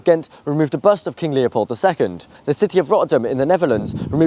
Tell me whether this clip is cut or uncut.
cut